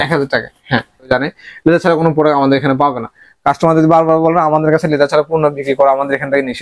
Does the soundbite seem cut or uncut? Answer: cut